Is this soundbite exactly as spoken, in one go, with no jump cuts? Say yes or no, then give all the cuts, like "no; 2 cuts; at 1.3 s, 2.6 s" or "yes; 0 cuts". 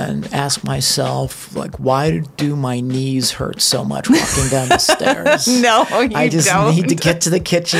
yes; 0 cuts